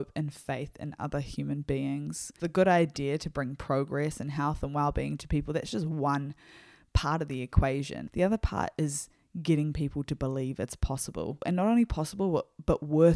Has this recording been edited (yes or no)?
yes